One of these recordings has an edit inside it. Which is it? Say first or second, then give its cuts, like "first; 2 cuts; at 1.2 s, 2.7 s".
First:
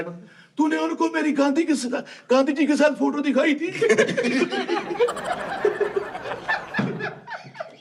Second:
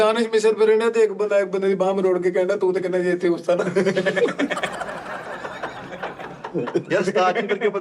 second; 1 cut; at 6.9 s